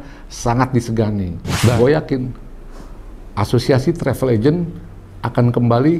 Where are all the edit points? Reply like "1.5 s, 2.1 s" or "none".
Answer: 1.7 s